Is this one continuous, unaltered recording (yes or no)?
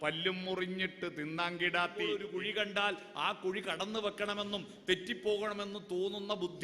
no